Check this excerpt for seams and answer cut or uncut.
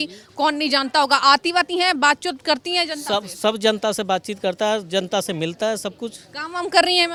uncut